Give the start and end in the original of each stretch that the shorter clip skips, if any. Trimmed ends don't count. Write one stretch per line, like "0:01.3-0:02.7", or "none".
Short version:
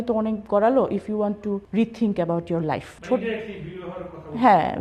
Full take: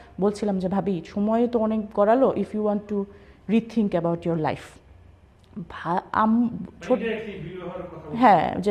0:03.1-0:03.4
0:04.7-0:06.7